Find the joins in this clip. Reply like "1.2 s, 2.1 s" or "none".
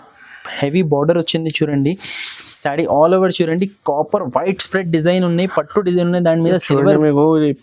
none